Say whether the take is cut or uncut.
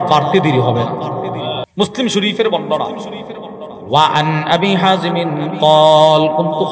cut